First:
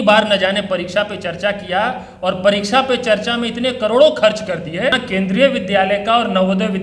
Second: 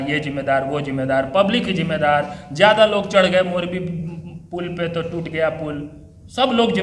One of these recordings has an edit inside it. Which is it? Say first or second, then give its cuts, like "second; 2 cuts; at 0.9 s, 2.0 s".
first; 1 cut; at 4.9 s